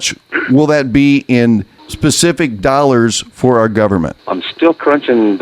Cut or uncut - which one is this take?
cut